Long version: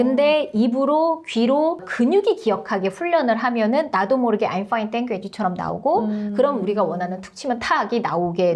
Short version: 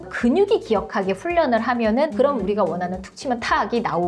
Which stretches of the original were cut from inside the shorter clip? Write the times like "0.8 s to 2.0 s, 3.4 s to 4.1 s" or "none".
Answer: 3.9 s to 6.3 s